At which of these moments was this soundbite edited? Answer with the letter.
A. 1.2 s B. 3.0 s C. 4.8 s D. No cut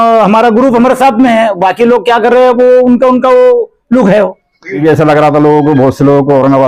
C